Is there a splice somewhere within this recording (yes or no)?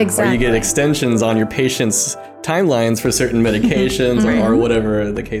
no